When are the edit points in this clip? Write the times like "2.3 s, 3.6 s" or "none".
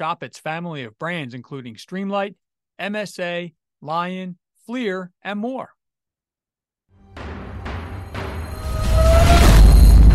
7.0 s